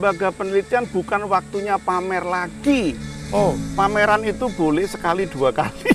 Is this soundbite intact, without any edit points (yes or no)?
yes